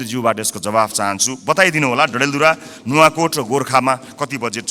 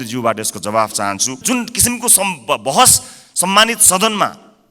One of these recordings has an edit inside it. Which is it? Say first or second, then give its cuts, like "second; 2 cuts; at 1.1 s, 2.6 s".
second; 1 cut; at 1.4 s